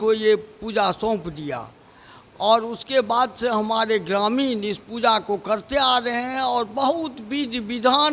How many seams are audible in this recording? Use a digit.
0